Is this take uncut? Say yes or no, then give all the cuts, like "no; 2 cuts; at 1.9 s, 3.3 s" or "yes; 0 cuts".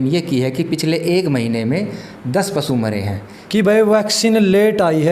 no; 1 cut; at 3.3 s